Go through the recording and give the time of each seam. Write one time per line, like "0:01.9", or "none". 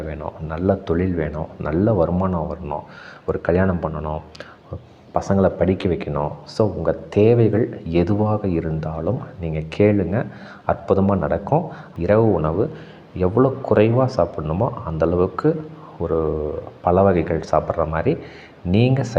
0:11.8